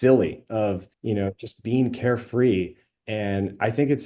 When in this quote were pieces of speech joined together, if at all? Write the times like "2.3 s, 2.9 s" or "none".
0.9 s